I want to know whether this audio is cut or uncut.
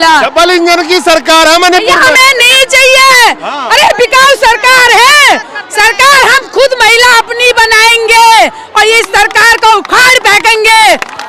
uncut